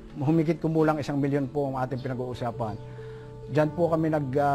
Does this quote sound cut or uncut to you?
uncut